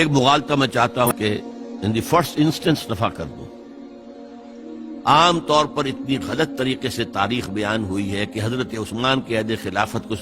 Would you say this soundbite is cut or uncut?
cut